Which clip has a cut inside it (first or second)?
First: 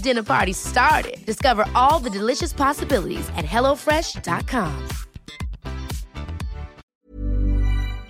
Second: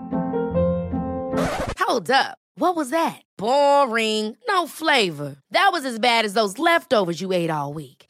first